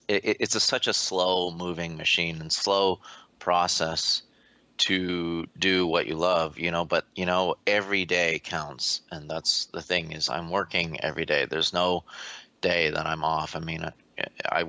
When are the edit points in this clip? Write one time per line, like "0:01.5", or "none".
none